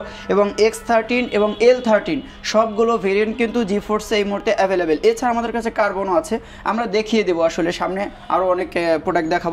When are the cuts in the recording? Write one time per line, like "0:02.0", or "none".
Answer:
none

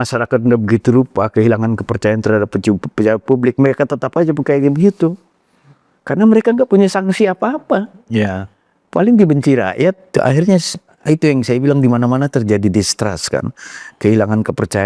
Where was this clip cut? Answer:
0:10.1

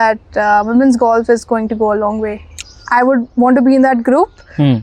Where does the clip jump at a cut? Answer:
0:02.5

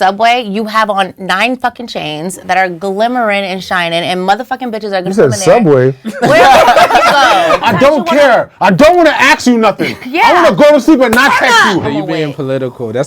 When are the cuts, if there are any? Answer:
0:07.6
0:11.9

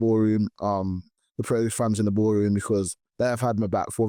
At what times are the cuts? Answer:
none

